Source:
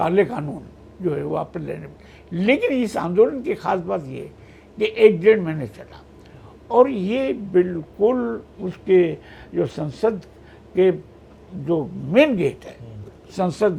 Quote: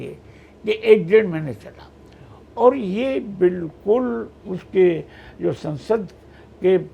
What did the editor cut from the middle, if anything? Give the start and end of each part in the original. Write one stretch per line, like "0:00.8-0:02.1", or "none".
none